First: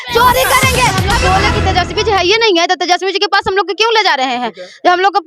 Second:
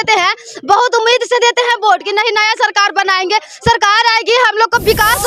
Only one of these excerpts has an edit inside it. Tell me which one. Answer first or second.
first